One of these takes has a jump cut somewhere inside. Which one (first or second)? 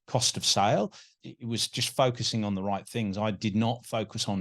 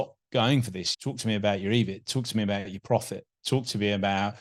first